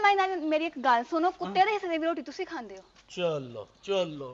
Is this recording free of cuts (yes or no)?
yes